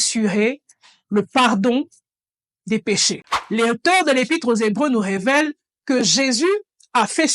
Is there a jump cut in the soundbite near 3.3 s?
yes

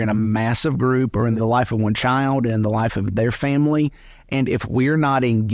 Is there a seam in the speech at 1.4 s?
yes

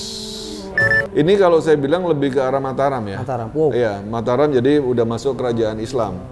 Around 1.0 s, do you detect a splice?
yes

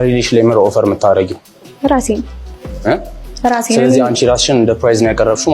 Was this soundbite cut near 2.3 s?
no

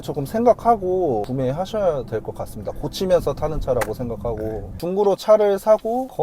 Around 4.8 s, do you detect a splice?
yes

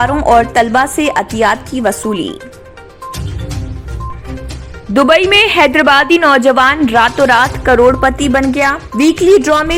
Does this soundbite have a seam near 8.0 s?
no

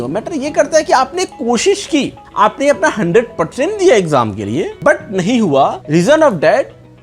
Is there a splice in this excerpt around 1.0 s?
no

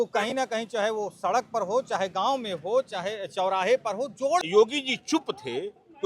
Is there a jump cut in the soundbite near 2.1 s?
no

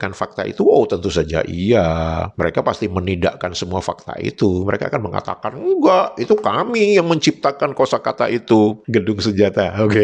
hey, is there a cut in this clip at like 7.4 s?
no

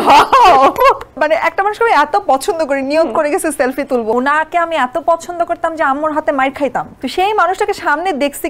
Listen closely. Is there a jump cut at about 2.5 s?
no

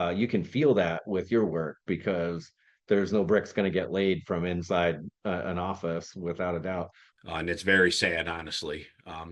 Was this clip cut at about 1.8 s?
no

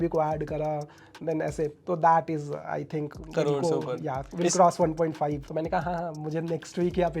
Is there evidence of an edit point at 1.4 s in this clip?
no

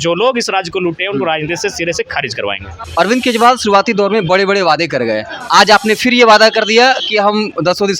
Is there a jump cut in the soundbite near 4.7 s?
no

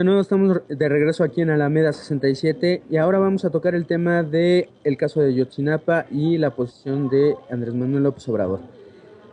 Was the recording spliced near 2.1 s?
no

